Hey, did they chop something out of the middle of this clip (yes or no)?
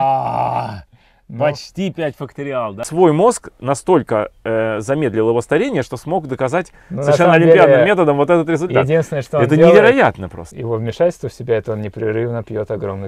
yes